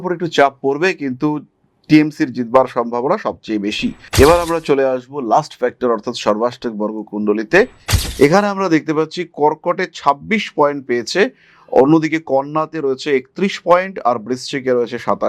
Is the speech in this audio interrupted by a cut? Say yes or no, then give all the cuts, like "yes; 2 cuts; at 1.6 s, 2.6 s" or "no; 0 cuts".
yes; 1 cut; at 4.0 s